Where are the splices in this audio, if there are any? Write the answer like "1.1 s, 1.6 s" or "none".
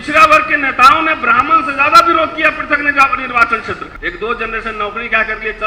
3.9 s

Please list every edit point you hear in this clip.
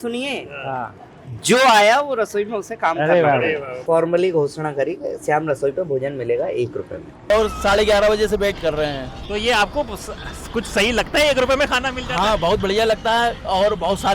3.7 s, 7.3 s

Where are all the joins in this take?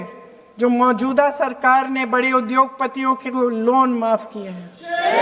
none

